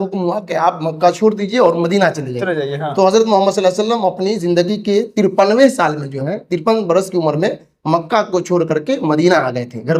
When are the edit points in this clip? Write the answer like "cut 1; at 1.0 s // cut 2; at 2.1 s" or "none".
none